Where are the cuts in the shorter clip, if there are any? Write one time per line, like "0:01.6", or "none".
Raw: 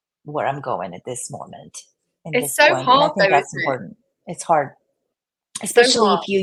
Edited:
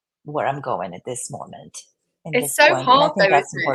none